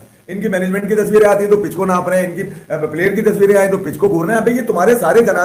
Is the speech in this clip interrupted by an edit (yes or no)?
no